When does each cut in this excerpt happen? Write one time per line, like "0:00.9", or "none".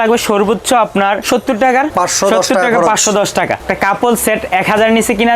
0:01.2
0:01.9
0:03.6